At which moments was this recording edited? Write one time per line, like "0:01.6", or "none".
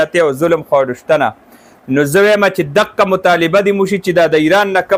none